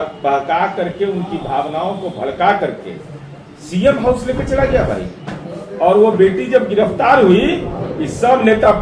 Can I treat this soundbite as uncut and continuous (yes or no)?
yes